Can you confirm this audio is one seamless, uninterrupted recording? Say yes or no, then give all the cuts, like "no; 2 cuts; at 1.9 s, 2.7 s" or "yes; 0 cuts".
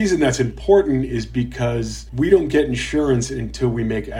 yes; 0 cuts